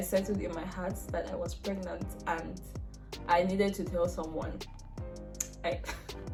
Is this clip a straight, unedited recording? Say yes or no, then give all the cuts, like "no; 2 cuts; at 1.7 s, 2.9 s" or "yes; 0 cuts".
yes; 0 cuts